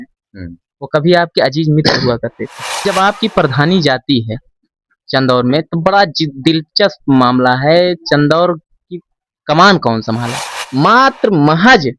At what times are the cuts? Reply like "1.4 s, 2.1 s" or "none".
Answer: 2.8 s, 10.6 s